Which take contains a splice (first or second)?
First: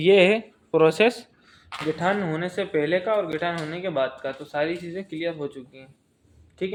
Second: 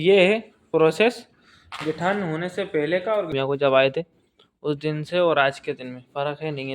second